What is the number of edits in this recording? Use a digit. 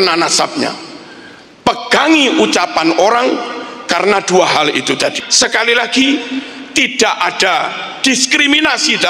1